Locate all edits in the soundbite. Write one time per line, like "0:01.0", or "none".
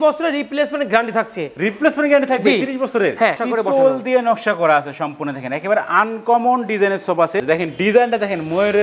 0:03.3
0:07.4